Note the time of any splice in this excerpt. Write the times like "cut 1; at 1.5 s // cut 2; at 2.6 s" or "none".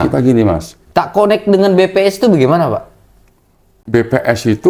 none